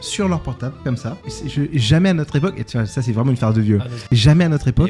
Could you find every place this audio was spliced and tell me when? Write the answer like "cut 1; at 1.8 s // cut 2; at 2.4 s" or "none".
cut 1; at 1.0 s // cut 2; at 4.0 s